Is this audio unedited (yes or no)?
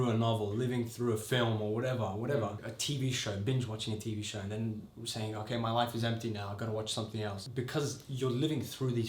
no